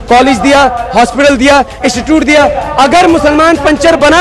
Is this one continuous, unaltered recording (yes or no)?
no